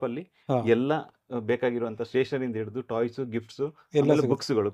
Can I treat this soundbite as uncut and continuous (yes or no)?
yes